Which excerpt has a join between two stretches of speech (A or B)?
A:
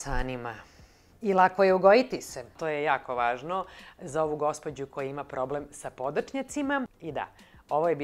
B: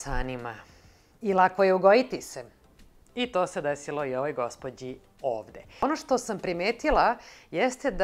A